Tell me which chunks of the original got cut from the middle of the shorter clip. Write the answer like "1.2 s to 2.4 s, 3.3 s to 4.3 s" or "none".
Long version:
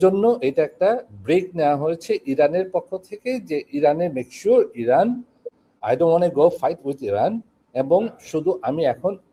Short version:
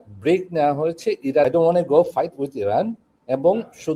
2.5 s to 5.9 s